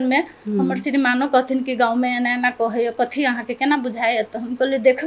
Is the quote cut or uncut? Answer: uncut